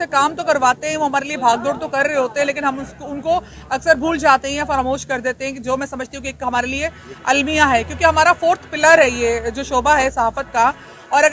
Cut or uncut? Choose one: uncut